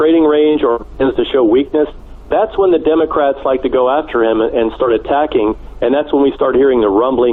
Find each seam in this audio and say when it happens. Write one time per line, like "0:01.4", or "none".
none